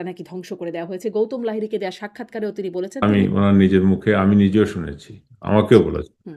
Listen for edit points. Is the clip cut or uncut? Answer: cut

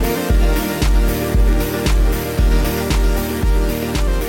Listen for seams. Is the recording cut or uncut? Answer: cut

